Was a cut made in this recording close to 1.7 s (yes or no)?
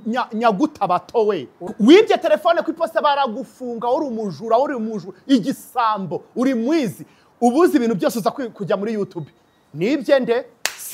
yes